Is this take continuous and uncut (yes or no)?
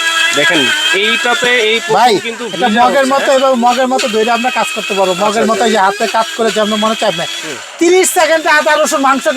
yes